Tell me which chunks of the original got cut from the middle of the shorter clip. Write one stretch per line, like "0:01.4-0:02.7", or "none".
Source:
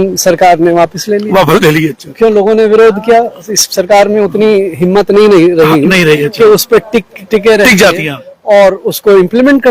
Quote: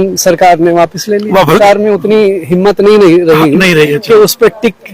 0:01.6-0:03.9